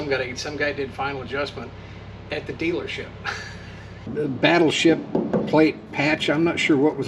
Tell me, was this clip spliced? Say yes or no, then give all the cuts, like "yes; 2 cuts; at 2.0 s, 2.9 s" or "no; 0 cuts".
yes; 1 cut; at 4.1 s